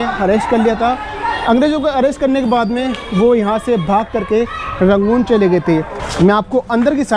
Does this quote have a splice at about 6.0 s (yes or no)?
yes